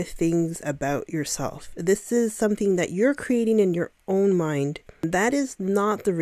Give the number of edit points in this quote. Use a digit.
1